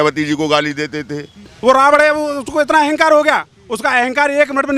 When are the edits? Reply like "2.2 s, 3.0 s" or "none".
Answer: 1.5 s